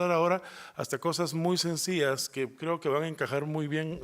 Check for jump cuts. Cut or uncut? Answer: cut